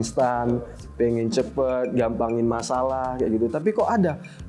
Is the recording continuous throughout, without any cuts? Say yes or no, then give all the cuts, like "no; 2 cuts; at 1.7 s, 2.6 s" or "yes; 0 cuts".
yes; 0 cuts